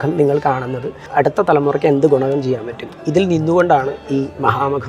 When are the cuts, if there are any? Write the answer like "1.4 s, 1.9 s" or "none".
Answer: 1.1 s